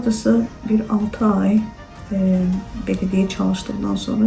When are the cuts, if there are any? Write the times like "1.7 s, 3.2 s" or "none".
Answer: none